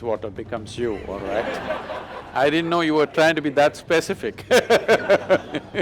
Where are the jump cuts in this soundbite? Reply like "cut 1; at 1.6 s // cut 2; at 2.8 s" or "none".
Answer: none